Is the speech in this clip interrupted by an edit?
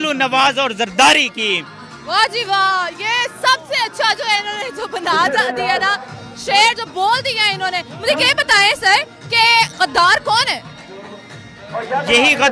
no; 0 cuts

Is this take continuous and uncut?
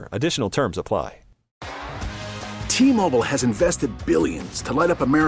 no; 1 cut; at 1.5 s

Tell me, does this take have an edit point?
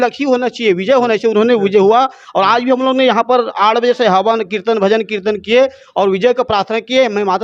no; 0 cuts

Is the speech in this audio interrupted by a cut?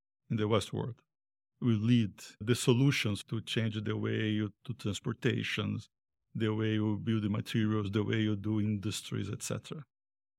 no; 0 cuts

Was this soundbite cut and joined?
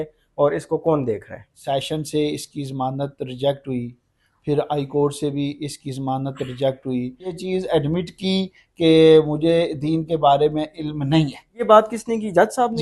yes; 3 cuts; at 1.5 s, 7.4 s, 11.6 s

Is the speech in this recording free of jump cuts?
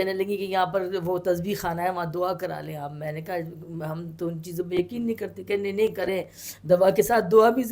yes; 0 cuts

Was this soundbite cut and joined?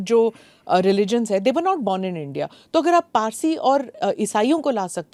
no; 0 cuts

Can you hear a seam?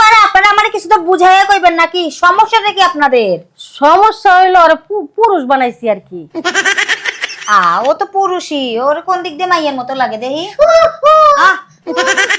no; 0 cuts

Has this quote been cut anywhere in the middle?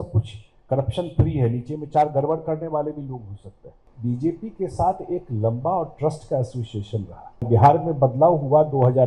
yes; 2 cuts; at 3.9 s, 7.5 s

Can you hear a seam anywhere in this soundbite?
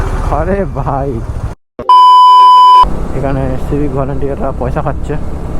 yes; 2 cuts; at 1.7 s, 2.9 s

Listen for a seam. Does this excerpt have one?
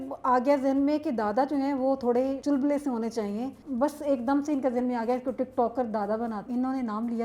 yes; 3 cuts; at 2.4 s, 3.6 s, 6.5 s

